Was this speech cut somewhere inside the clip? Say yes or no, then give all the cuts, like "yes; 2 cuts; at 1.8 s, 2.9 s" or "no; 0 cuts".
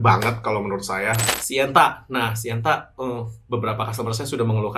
yes; 1 cut; at 1.3 s